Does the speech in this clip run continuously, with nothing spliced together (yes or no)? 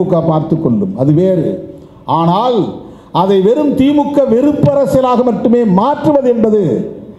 yes